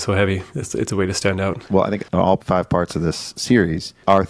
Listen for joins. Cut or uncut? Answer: cut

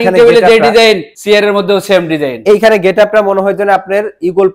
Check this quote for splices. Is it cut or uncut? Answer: cut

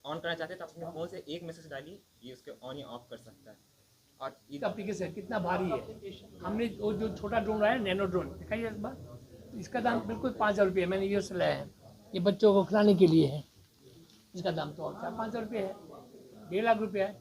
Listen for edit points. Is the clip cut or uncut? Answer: cut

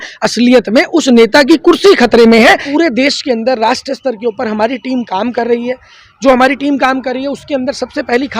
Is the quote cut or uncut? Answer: cut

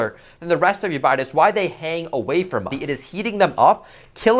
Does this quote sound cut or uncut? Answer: cut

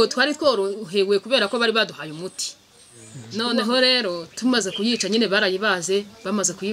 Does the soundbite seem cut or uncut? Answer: cut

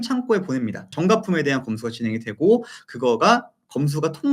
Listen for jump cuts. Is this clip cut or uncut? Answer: cut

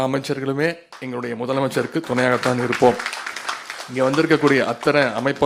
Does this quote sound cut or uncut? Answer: uncut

